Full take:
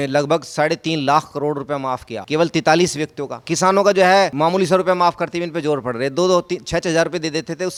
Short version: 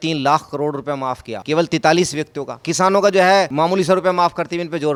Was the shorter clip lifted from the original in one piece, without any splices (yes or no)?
yes